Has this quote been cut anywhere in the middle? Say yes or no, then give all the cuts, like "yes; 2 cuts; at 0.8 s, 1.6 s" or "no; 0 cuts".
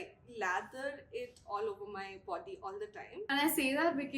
yes; 1 cut; at 3.3 s